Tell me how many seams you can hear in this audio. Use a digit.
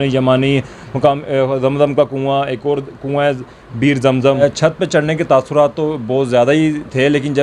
1